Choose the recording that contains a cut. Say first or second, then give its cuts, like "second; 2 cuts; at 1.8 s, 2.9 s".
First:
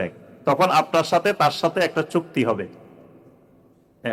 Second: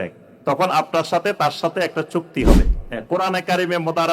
second; 1 cut; at 2.8 s